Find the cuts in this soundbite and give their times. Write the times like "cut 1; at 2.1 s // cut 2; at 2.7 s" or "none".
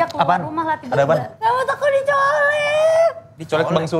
cut 1; at 1.3 s